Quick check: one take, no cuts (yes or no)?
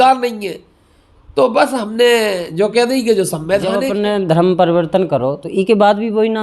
no